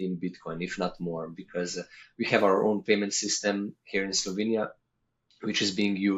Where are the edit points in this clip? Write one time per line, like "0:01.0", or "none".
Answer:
none